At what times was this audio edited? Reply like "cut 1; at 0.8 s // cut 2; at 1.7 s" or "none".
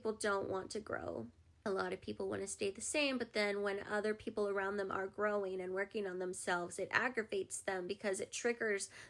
cut 1; at 1.5 s